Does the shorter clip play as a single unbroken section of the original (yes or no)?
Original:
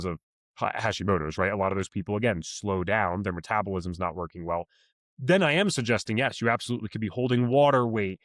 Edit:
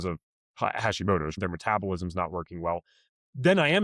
no